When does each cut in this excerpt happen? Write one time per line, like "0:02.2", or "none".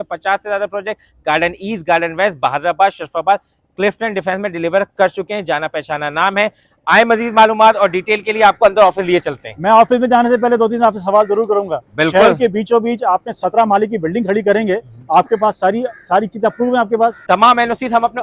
none